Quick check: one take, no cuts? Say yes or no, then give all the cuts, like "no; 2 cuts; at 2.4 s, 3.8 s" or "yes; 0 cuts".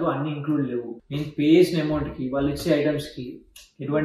yes; 0 cuts